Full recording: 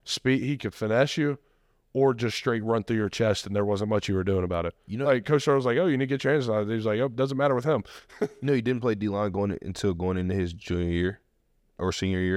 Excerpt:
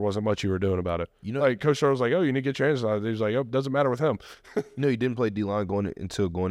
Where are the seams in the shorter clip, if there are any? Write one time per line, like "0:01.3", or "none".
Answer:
none

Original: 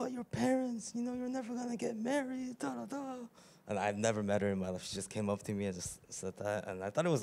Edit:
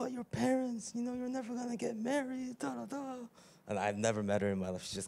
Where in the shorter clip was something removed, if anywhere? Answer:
none

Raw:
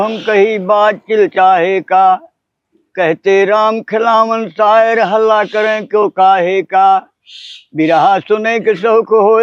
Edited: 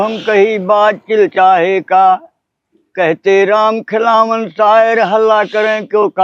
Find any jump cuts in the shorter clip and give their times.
none

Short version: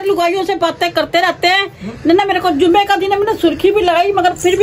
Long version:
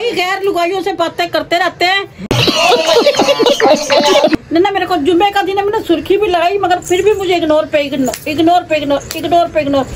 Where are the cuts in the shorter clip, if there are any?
0:02.0

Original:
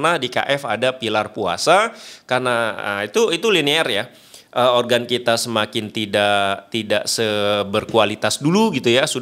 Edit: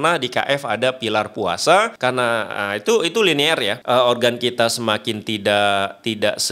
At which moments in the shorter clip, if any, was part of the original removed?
0:01.9
0:03.7

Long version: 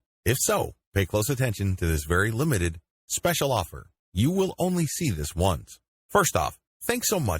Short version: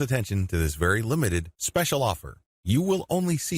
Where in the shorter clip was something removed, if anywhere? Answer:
0:01.6

